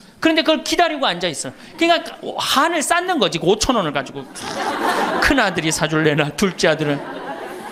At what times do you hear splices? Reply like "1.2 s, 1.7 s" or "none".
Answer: none